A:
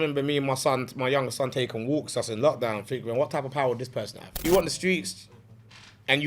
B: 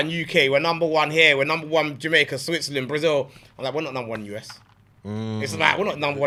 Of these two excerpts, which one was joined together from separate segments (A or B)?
A